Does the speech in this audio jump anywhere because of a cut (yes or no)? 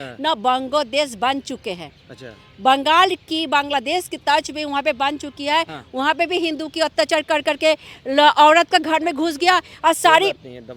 no